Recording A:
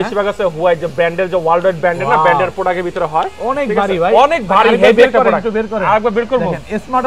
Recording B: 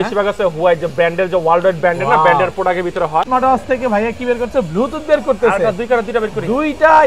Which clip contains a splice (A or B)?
B